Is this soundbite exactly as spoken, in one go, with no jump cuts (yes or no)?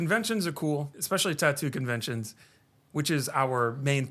no